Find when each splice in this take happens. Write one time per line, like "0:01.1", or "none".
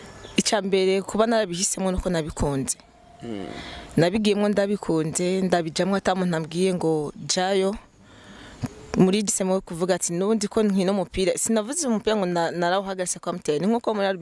0:09.3